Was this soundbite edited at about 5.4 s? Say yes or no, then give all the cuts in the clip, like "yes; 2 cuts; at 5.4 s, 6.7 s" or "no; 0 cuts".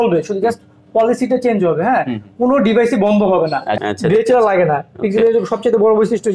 no; 1 cut; at 3.7 s